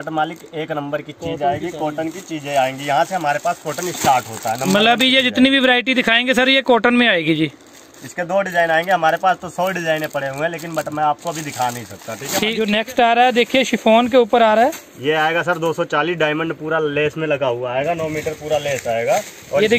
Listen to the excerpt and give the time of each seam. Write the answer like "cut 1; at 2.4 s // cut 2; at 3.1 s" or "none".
cut 1; at 12.6 s